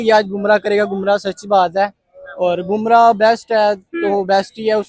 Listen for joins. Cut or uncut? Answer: uncut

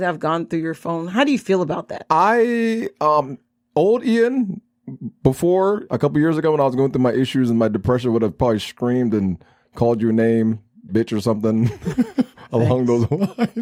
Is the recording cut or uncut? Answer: uncut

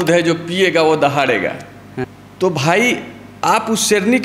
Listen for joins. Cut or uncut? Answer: cut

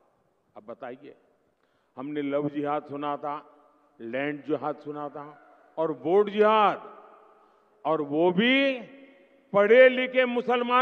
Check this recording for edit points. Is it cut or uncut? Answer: uncut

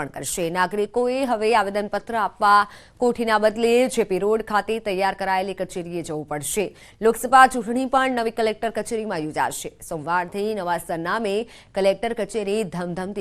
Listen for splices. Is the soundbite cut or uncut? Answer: uncut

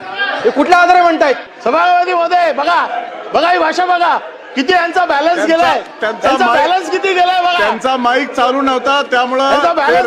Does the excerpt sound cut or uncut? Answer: cut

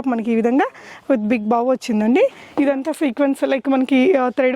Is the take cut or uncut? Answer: cut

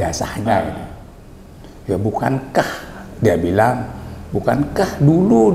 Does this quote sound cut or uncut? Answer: uncut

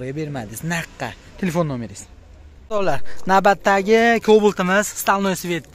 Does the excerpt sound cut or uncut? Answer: cut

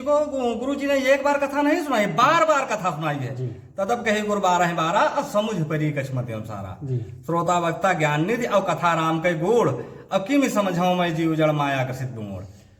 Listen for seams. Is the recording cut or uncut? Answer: uncut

